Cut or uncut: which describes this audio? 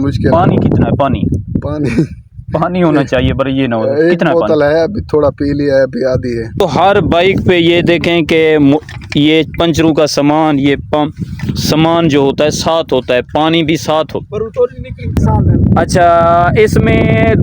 cut